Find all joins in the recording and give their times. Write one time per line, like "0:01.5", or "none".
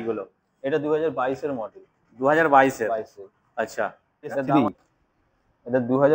0:04.5